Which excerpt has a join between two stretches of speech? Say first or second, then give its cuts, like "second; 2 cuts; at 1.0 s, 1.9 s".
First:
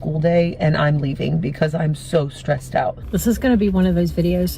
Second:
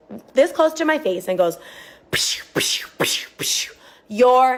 first; 1 cut; at 3.1 s